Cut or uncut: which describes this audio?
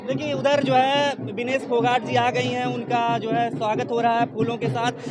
uncut